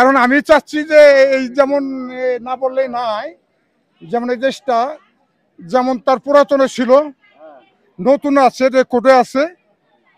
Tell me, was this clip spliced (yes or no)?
no